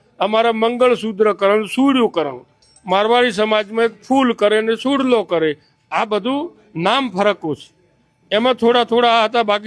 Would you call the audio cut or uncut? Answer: uncut